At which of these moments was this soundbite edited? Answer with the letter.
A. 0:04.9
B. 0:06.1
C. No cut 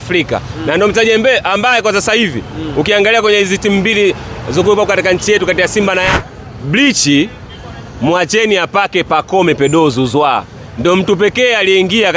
B